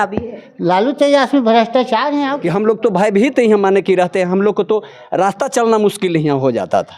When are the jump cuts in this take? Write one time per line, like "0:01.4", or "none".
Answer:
0:02.3